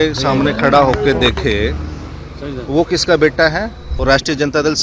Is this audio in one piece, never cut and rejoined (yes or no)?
no